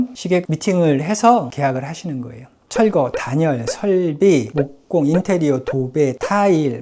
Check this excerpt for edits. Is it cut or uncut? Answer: cut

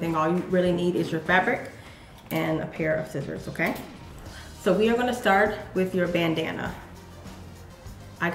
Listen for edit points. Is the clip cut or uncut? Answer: cut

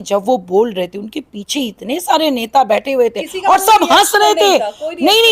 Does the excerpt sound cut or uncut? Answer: uncut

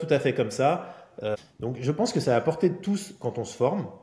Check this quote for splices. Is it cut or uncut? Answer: cut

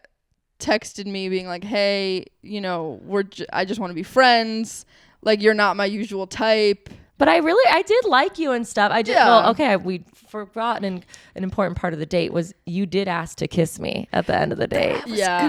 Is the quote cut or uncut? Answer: uncut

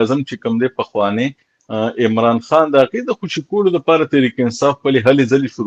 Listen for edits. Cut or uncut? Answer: uncut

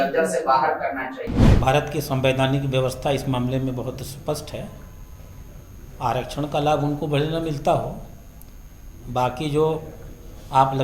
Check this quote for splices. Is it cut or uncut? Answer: cut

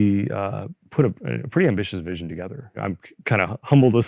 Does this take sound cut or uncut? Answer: cut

